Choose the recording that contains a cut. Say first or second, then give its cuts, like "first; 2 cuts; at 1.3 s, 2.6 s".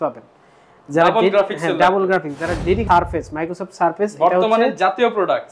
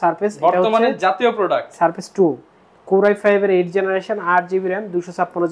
first; 1 cut; at 2.8 s